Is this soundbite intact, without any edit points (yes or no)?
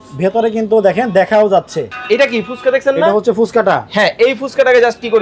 no